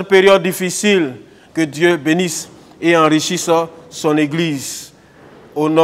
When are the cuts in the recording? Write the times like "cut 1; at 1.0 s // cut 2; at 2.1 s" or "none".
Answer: cut 1; at 1.4 s